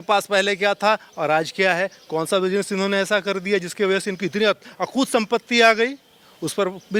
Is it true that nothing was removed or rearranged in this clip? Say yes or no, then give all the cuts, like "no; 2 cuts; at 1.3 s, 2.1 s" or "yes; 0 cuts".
yes; 0 cuts